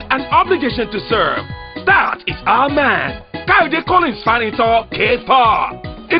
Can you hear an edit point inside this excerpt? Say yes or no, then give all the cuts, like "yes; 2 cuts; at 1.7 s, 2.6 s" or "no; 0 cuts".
no; 0 cuts